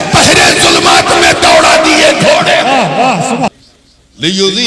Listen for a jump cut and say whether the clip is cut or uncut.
cut